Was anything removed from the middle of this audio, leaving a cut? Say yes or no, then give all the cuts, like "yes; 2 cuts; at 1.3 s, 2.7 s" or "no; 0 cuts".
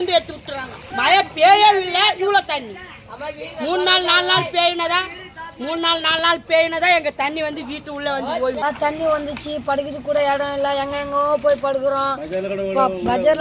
yes; 2 cuts; at 0.9 s, 8.6 s